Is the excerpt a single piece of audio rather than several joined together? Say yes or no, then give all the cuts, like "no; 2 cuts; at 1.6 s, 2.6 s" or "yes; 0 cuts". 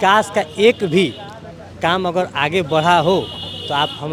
yes; 0 cuts